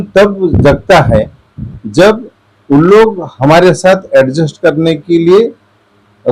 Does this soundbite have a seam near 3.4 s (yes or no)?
no